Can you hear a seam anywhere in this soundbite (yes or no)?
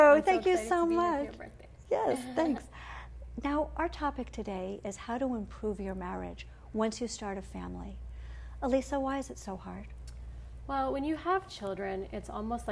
yes